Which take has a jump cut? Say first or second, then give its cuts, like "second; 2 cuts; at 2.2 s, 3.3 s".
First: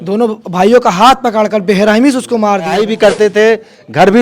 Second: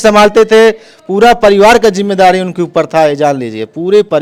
first; 1 cut; at 2.7 s